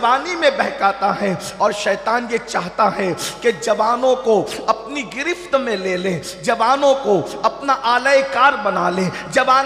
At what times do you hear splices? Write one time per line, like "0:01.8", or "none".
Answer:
none